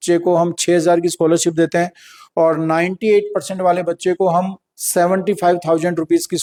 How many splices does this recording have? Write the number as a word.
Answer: zero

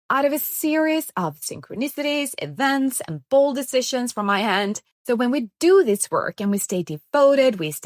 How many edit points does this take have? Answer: one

